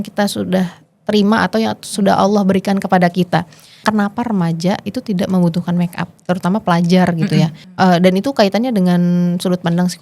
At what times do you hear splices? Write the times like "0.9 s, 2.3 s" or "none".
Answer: 3.8 s, 7.6 s